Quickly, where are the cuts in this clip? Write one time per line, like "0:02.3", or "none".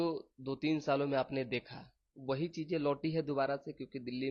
none